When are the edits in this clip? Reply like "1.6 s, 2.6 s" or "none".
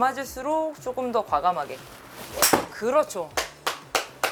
none